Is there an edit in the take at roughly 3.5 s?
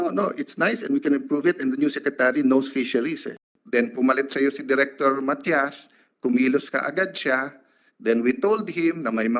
yes; 1 cut; at 3.5 s

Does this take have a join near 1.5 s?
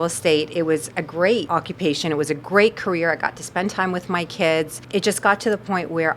yes; 2 cuts; at 1.5 s, 4.8 s

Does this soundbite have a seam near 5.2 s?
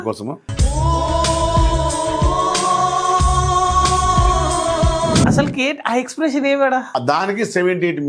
yes; 2 cuts; at 5.2 s, 6.9 s

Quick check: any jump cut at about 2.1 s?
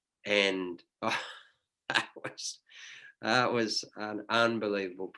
no; 0 cuts

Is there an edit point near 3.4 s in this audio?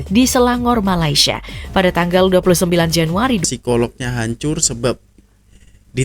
yes; 1 cut; at 3.4 s

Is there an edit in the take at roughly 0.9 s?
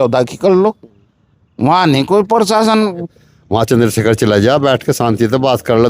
no; 1 cut; at 3.1 s

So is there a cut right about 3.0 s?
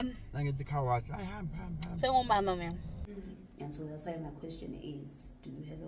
yes; 1 cut; at 3.0 s

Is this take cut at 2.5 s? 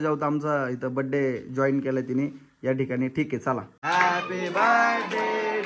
no; 1 cut; at 3.7 s

